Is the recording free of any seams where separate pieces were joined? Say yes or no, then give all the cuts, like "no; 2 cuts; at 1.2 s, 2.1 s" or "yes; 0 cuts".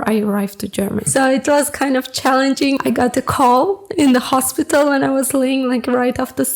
no; 2 cuts; at 1.1 s, 2.8 s